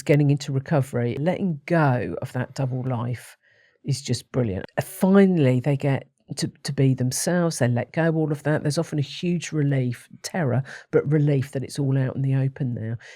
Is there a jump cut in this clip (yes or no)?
yes